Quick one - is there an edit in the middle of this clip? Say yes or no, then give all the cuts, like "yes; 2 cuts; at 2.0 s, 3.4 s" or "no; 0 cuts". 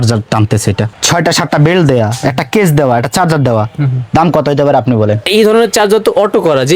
yes; 2 cuts; at 0.9 s, 5.2 s